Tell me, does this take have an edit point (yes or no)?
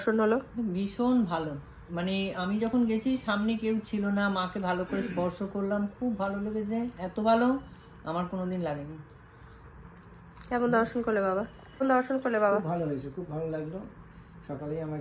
no